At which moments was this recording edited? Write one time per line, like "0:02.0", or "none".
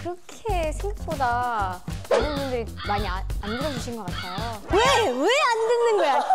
0:04.6